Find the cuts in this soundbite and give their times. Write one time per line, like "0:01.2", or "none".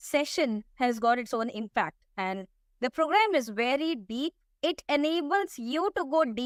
none